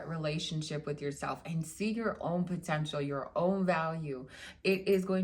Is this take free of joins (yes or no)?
yes